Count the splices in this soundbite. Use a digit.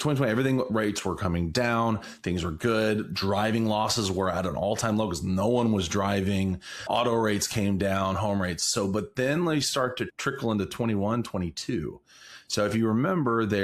1